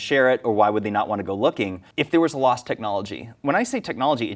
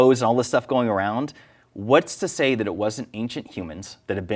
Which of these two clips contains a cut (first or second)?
first